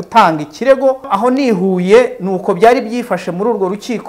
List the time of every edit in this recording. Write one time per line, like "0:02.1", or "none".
0:01.1